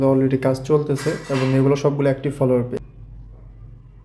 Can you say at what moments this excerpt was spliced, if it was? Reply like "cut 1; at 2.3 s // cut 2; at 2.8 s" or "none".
cut 1; at 2.8 s